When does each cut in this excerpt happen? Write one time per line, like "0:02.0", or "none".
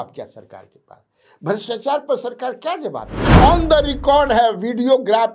0:03.2